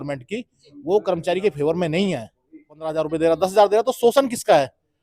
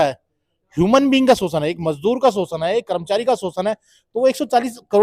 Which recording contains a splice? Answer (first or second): first